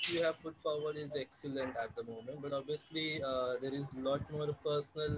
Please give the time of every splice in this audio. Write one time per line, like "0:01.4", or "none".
none